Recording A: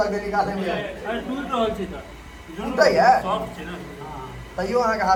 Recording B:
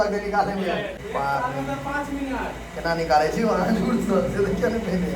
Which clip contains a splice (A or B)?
B